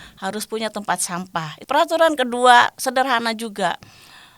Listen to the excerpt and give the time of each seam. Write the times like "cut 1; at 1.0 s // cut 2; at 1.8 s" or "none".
cut 1; at 1.5 s